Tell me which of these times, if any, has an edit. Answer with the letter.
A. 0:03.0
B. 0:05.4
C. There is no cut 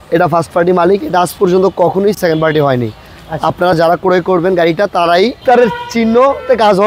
B